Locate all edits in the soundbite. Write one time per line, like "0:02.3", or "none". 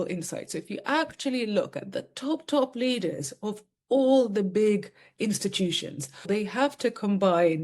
0:06.2